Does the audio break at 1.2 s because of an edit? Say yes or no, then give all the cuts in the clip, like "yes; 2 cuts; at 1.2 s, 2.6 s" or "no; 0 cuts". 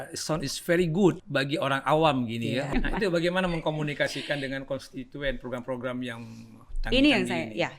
yes; 2 cuts; at 1.2 s, 2.7 s